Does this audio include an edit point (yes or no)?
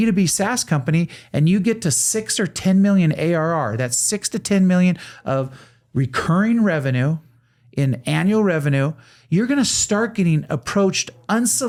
no